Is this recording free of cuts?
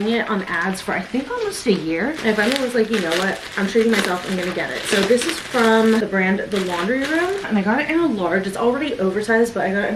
yes; 0 cuts

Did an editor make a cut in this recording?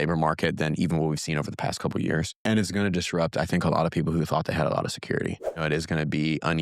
yes; 1 cut; at 5.6 s

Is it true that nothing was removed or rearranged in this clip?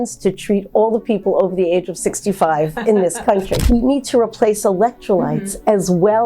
no; 1 cut; at 3.6 s

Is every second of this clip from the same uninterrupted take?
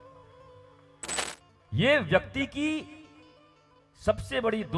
no; 1 cut; at 1.2 s

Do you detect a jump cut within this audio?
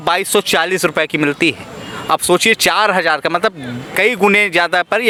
no; 0 cuts

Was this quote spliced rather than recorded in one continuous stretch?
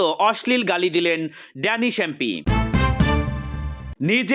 yes; 1 cut; at 2.4 s

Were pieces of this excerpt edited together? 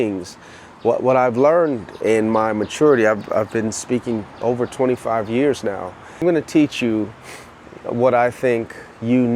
yes; 2 cuts; at 1.9 s, 6.2 s

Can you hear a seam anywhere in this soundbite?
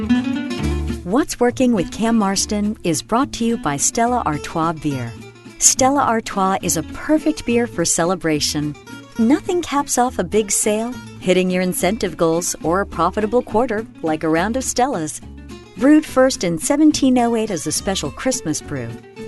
yes; 1 cut; at 0.9 s

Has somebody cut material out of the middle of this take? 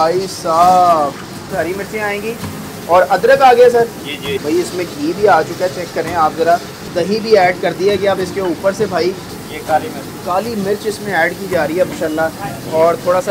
yes; 5 cuts; at 1.5 s, 4.3 s, 6.9 s, 9.3 s, 11.9 s

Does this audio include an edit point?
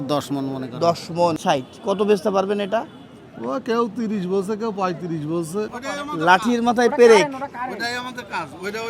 yes; 2 cuts; at 1.4 s, 5.8 s

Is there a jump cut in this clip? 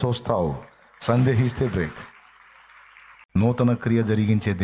yes; 1 cut; at 3.4 s

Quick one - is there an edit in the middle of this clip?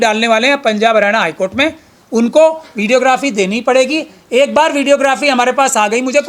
no; 0 cuts

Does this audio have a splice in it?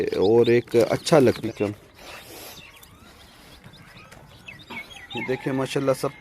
yes; 1 cut; at 1.4 s

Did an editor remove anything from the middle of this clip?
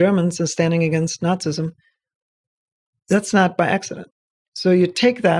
yes; 1 cut; at 4.2 s

